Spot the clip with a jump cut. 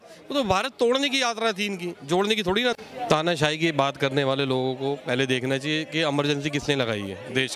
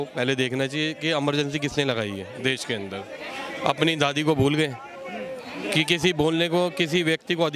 first; 1 cut; at 2.8 s

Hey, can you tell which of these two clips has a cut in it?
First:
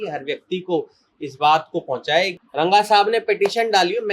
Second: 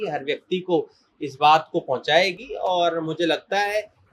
first; 1 cut; at 2.4 s

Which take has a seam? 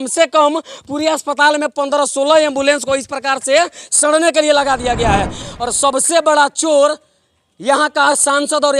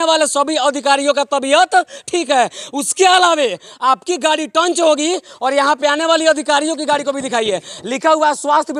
first; 1 cut; at 5.5 s

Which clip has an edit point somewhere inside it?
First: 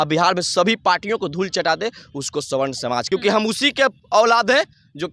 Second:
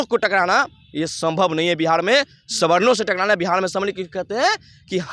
first; 1 cut; at 3.0 s

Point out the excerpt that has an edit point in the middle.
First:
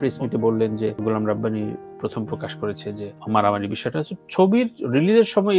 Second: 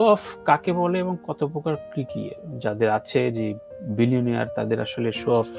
first; 2 cuts; at 1.0 s, 3.1 s

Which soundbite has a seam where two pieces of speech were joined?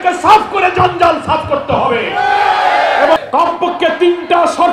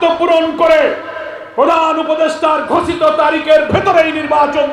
first; 1 cut; at 3.2 s

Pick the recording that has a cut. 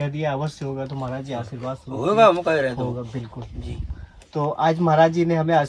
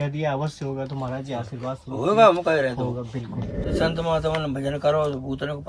second; 1 cut; at 3.7 s

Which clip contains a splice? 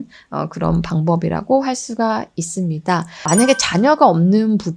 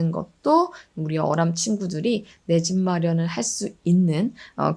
first; 1 cut; at 3.1 s

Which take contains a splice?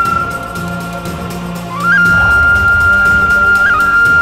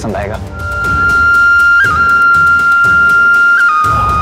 second; 1 cut; at 0.9 s

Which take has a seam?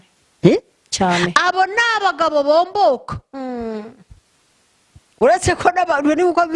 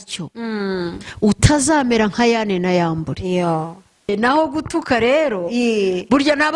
second; 1 cut; at 4.1 s

